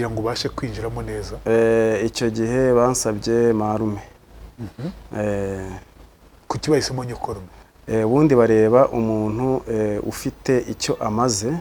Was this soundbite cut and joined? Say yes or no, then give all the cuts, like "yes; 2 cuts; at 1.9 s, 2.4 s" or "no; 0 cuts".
no; 0 cuts